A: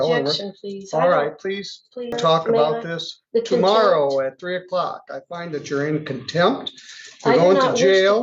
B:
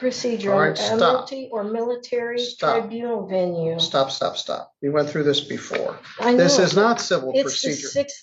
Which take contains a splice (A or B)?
A